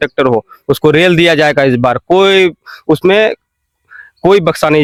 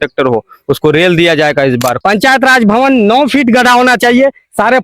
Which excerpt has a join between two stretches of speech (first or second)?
second